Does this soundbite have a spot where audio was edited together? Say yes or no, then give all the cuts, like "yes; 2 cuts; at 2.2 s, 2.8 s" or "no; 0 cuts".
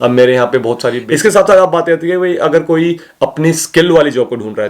yes; 1 cut; at 1.0 s